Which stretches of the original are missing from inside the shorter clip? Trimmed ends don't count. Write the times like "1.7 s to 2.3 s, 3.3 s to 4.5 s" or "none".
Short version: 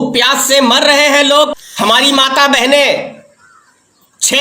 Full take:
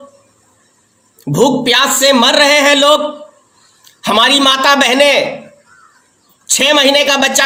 3.2 s to 3.9 s